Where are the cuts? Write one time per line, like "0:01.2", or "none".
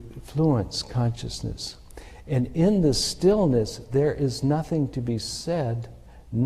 none

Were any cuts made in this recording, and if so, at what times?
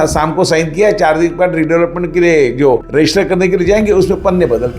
none

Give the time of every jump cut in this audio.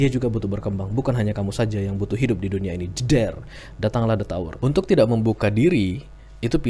0:04.5

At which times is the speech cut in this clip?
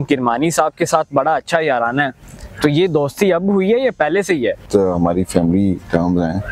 0:04.6

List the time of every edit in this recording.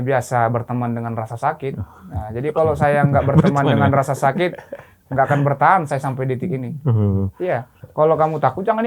0:07.8

